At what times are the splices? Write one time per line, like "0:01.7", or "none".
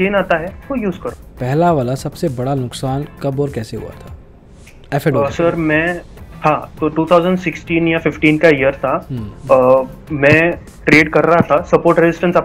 0:01.1